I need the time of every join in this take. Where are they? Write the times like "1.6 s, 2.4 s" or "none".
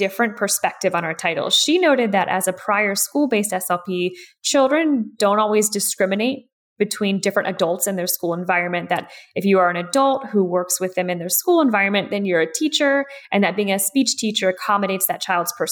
none